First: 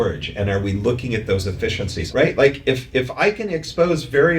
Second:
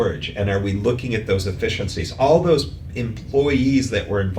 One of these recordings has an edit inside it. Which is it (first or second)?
first